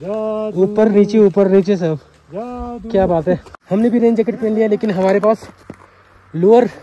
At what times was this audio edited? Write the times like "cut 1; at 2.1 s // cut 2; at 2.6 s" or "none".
none